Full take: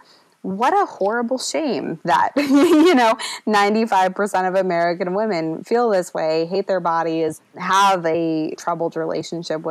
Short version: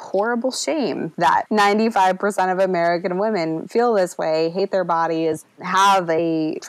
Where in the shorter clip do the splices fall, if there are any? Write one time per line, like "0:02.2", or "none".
0:01.4